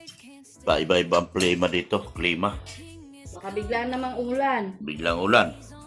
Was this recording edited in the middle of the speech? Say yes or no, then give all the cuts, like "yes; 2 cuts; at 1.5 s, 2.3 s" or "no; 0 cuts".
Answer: no; 0 cuts